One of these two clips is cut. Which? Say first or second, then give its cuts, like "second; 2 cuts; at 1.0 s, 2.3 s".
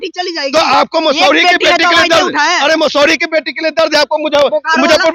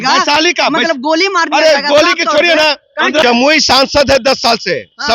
second; 1 cut; at 3.2 s